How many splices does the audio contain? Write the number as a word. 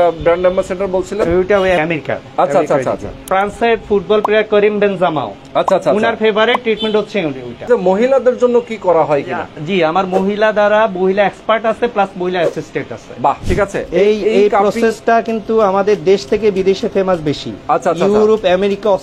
five